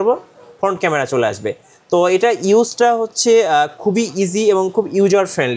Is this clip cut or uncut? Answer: uncut